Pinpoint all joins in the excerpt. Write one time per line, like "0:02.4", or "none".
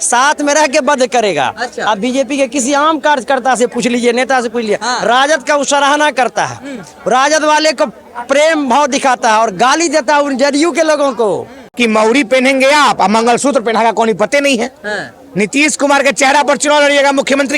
0:11.7